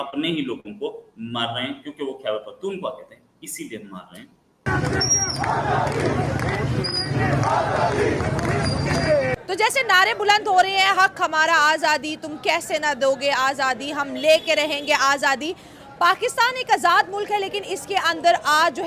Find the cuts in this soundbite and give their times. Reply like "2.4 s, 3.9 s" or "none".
4.6 s